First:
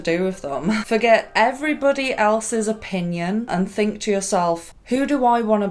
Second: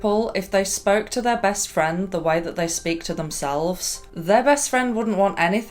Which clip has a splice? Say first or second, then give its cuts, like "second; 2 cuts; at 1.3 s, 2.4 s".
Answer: first; 3 cuts; at 0.8 s, 3.5 s, 4.7 s